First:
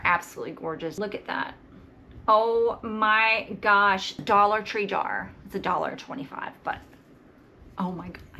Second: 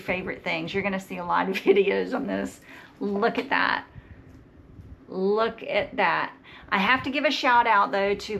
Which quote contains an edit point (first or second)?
first